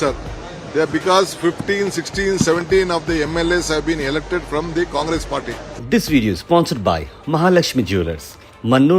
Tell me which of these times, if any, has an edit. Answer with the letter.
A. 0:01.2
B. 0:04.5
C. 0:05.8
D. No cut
C